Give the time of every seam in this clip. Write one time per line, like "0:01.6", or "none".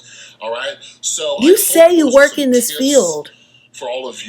0:02.6